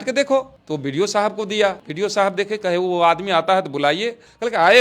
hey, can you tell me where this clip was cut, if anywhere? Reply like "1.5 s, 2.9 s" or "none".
1.9 s